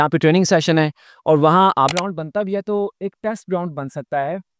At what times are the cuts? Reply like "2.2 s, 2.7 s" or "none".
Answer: 1.9 s